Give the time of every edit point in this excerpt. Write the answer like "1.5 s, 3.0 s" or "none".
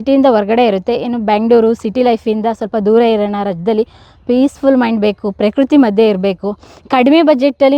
none